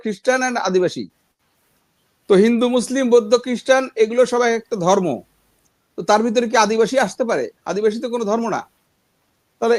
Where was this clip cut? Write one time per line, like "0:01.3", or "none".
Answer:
none